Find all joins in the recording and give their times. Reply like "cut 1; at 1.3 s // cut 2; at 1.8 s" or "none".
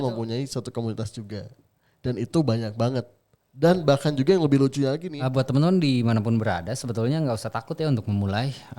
cut 1; at 5.1 s